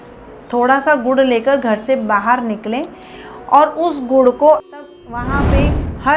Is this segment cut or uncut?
cut